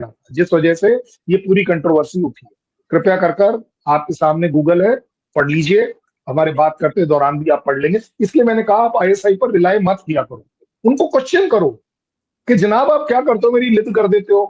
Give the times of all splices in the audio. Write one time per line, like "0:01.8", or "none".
none